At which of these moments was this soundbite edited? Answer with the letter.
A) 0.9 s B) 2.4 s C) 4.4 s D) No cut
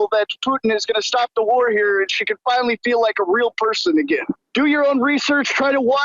C